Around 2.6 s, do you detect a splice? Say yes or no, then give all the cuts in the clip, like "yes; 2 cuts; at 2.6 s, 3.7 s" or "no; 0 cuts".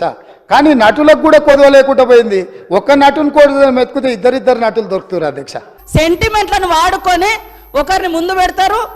no; 1 cut; at 5.7 s